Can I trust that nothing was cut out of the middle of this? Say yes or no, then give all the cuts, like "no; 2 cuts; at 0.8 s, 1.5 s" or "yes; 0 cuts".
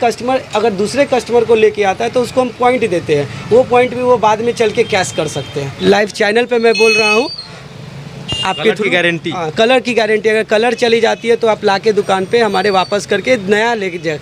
no; 1 cut; at 5.6 s